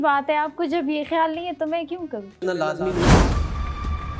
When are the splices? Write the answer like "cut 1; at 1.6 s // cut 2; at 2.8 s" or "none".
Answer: cut 1; at 2.4 s